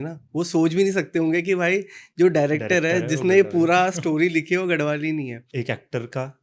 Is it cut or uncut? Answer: cut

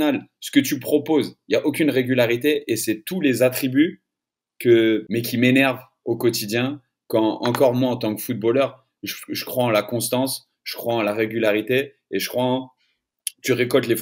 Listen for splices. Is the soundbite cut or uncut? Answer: cut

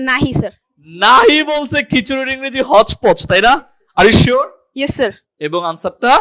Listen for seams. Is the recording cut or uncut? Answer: cut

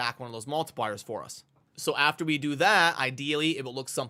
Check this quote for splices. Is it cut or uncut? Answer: uncut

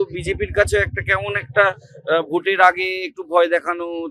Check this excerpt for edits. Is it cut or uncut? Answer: uncut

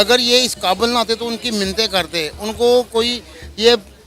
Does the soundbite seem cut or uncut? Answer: uncut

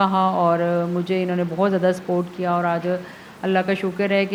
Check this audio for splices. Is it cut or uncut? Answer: uncut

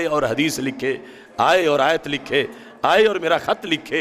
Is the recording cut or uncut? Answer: uncut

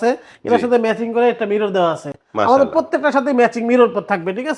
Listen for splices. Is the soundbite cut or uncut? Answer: uncut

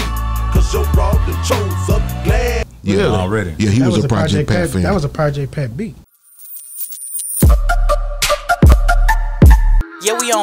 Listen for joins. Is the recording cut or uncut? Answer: cut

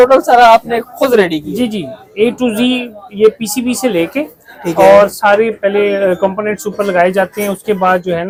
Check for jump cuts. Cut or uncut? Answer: uncut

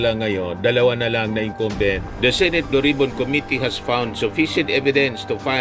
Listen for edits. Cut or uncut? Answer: cut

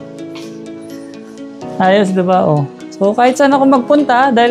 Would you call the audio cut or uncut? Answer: uncut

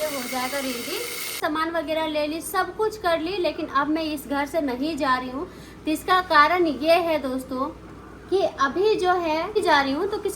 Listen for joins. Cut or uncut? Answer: cut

